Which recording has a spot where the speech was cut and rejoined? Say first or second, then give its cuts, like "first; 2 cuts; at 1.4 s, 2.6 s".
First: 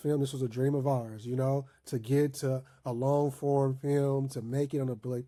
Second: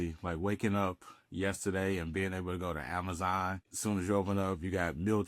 second; 1 cut; at 3.7 s